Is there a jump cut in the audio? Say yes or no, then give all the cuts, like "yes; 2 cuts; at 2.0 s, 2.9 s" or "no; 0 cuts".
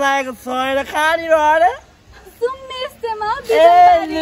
no; 0 cuts